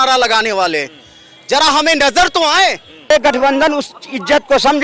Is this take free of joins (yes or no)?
no